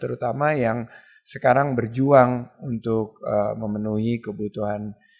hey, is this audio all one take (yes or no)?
yes